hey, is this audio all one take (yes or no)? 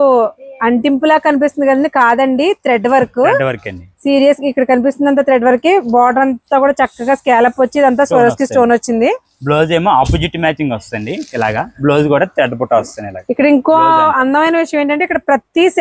yes